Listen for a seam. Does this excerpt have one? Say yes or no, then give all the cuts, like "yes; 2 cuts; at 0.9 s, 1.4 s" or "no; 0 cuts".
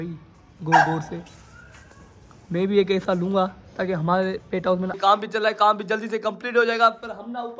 yes; 1 cut; at 5.0 s